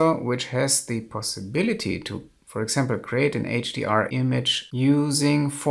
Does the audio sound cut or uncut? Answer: cut